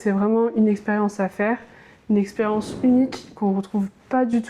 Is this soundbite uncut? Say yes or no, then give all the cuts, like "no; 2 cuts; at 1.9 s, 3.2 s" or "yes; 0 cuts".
yes; 0 cuts